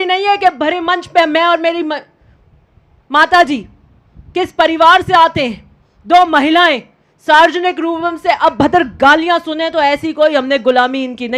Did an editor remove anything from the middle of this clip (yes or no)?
no